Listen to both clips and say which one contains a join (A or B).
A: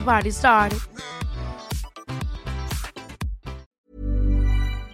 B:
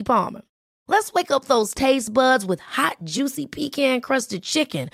A